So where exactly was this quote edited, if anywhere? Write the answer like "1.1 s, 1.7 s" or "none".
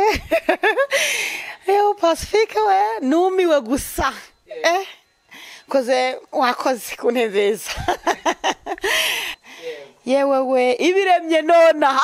9.3 s